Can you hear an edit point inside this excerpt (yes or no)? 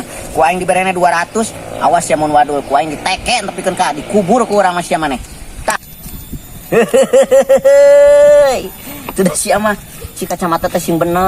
yes